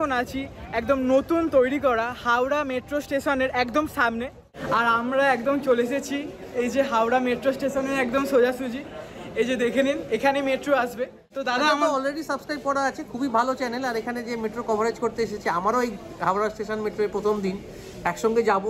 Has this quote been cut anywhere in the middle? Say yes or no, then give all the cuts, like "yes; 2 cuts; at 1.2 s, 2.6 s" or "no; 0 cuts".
yes; 2 cuts; at 4.5 s, 11.3 s